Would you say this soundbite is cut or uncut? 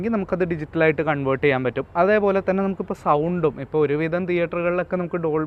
uncut